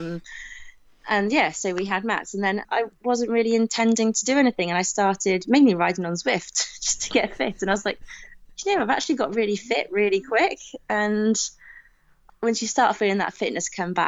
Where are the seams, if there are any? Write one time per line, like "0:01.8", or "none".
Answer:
0:02.6
0:12.3